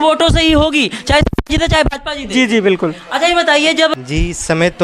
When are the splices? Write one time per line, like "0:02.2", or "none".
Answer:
0:03.9